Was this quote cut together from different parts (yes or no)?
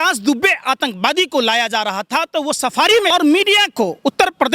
yes